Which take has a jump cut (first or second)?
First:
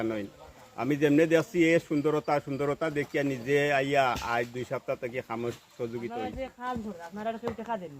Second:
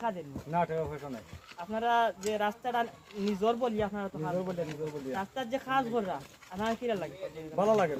first